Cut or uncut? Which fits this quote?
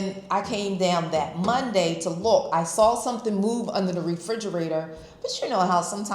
uncut